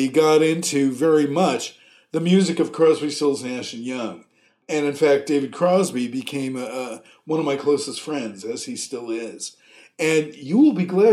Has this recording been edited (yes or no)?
yes